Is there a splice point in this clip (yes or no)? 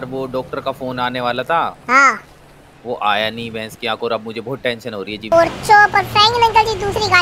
yes